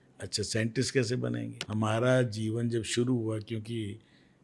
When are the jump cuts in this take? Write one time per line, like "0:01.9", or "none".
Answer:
0:01.6